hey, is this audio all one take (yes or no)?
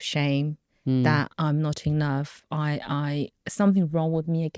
no